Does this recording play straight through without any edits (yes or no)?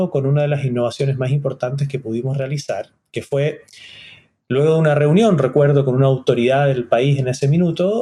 yes